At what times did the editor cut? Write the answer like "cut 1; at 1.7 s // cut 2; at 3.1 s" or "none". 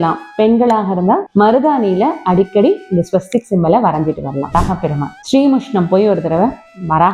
cut 1; at 1.3 s // cut 2; at 4.5 s